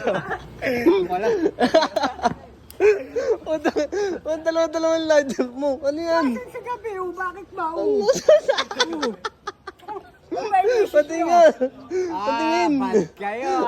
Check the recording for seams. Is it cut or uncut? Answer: uncut